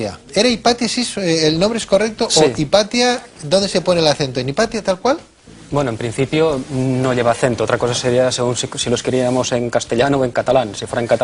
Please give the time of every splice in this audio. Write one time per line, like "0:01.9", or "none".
0:06.0